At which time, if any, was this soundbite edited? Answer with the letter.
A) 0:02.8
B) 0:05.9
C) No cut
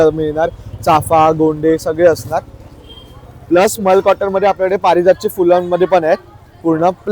C